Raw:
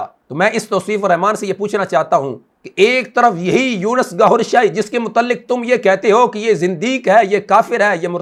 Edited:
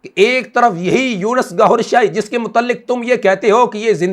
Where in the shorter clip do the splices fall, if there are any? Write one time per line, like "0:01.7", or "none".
none